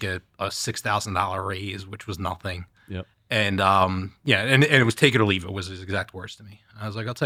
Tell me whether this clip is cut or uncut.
uncut